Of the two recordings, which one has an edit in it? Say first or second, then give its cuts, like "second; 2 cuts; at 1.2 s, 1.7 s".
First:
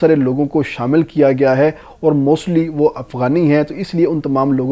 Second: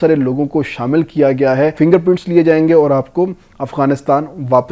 second; 1 cut; at 1.7 s